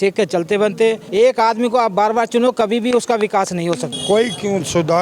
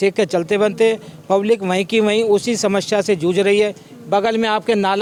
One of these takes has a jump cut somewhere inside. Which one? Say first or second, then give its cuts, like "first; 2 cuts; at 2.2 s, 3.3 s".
first; 2 cuts; at 1.0 s, 3.9 s